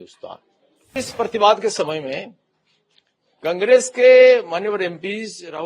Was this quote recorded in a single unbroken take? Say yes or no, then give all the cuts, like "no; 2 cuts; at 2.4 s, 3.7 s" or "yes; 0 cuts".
no; 1 cut; at 1.0 s